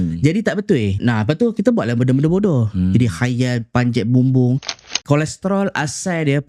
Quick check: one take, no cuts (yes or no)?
no